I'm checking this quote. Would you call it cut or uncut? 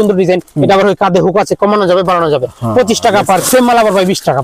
cut